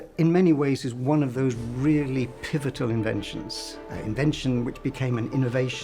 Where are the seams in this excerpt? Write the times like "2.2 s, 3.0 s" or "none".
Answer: none